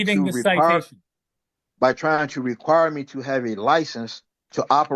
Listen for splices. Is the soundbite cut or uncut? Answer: uncut